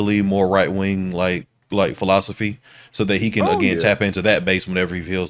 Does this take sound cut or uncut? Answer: uncut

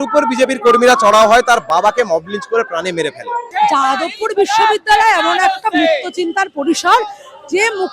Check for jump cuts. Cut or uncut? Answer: cut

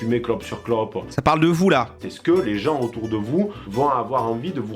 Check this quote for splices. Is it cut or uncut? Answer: cut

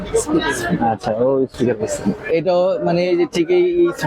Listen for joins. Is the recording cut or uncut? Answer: uncut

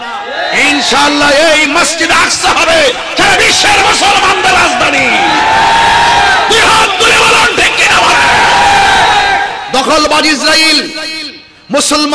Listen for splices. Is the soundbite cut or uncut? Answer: cut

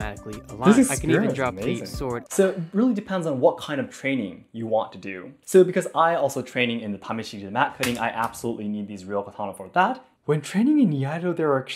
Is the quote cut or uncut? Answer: cut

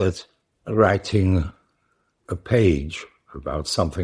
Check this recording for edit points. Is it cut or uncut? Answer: uncut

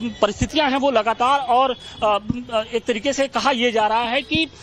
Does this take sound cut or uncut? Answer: uncut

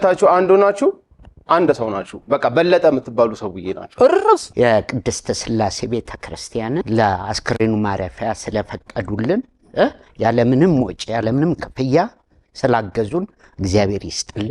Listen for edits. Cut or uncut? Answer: cut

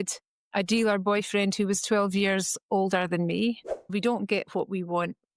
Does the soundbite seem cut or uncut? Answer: cut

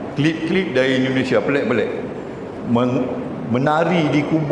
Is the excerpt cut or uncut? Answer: uncut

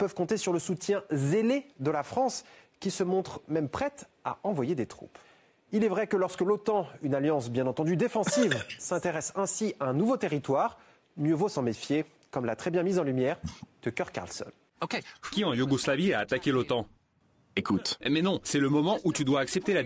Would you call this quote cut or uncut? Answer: cut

